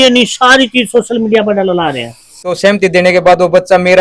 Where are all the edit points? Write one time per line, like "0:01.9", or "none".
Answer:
0:02.5